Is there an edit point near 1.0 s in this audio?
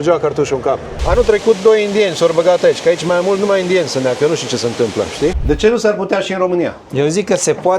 yes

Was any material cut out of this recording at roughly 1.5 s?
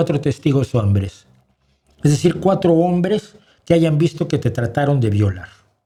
no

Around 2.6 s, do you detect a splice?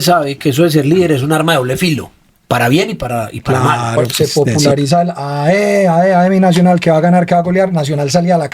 no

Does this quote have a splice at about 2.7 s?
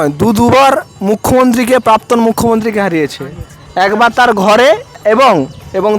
no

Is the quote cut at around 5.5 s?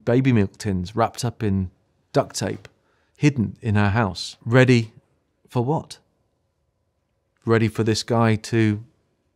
no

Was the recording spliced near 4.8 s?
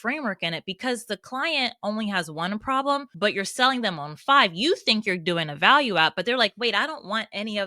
no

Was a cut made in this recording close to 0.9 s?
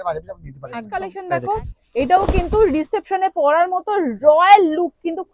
yes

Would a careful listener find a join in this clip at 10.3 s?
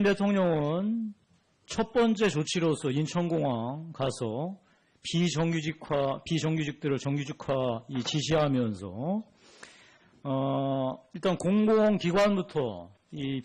yes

